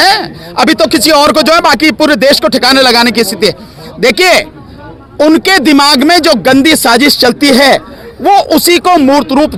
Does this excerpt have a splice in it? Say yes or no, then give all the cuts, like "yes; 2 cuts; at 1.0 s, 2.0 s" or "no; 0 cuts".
no; 0 cuts